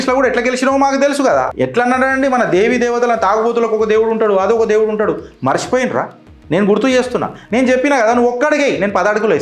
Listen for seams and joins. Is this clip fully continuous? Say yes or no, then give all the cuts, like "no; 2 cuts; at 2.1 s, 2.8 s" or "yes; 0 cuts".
no; 1 cut; at 1.5 s